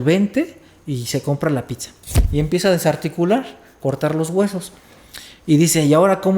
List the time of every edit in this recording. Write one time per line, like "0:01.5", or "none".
0:02.1